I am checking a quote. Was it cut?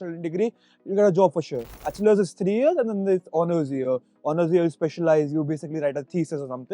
yes; 1 cut; at 1.8 s

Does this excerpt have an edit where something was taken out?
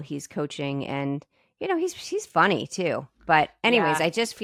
no; 0 cuts

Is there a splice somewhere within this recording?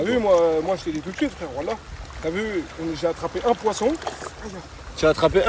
no; 0 cuts

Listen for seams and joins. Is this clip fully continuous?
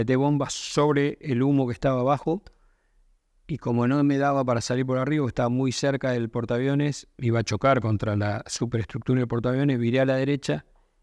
yes; 0 cuts

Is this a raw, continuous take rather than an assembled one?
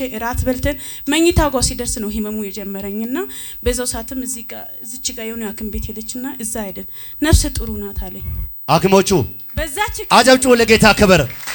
yes; 0 cuts

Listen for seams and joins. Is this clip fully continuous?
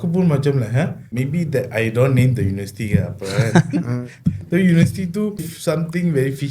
no; 2 cuts; at 1.1 s, 5.5 s

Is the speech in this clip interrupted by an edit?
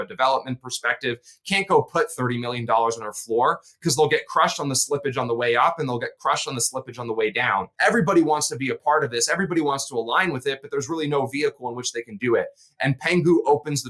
yes; 1 cut; at 7.7 s

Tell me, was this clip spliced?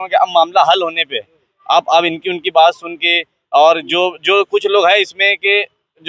no; 0 cuts

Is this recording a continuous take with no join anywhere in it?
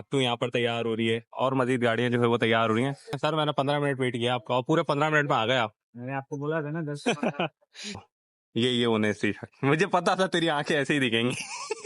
no; 2 cuts; at 3.2 s, 7.8 s

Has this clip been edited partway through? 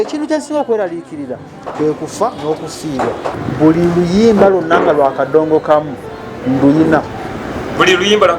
yes; 1 cut; at 3.4 s

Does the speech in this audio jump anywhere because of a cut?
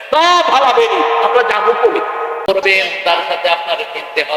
yes; 1 cut; at 2.5 s

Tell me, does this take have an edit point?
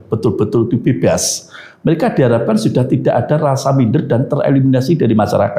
no; 0 cuts

